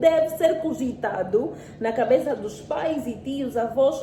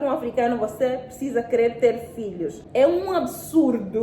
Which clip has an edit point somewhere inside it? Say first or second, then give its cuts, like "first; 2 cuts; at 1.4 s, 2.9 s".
second; 1 cut; at 2.5 s